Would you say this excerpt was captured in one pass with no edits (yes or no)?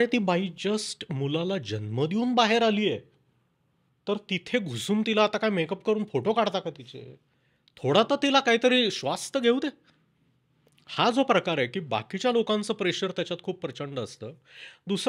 yes